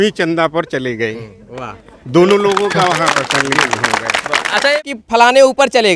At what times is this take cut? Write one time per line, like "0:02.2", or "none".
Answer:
0:04.8